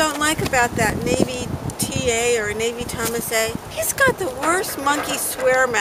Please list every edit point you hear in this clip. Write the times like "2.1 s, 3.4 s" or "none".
3.7 s